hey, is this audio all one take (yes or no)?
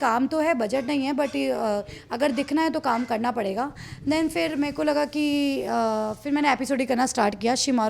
yes